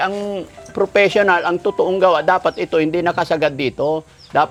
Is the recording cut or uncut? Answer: uncut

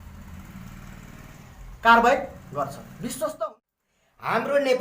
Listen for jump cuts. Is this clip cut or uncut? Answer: cut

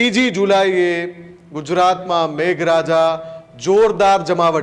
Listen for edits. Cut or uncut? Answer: uncut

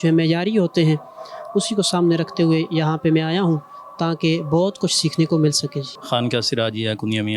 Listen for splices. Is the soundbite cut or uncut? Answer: uncut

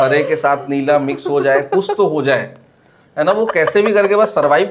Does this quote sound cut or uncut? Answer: uncut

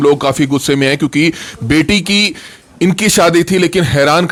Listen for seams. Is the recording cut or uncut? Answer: uncut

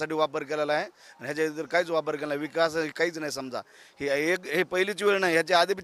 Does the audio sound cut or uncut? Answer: uncut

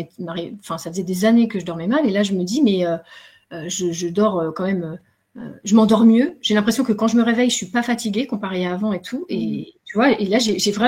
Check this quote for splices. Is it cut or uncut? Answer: uncut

